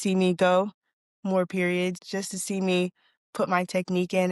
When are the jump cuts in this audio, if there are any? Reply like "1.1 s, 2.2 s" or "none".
2.0 s